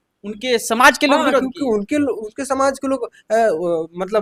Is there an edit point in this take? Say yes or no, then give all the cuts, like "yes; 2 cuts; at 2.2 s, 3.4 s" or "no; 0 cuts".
no; 0 cuts